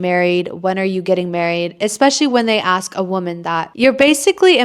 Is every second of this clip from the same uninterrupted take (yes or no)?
no